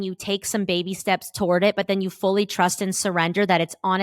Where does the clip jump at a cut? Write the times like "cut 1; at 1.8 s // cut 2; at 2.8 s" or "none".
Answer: none